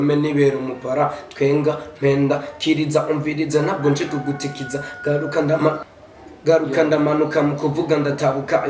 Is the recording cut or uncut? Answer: cut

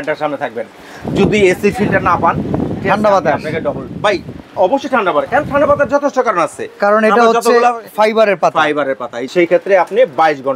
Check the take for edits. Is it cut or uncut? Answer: cut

